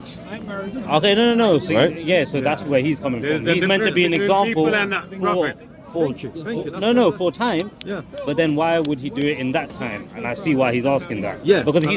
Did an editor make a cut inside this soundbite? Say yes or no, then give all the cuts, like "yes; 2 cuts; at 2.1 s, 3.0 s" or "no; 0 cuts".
no; 0 cuts